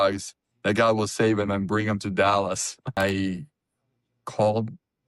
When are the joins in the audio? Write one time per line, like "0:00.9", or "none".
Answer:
0:03.0